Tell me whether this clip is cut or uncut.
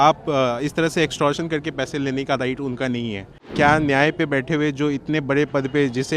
cut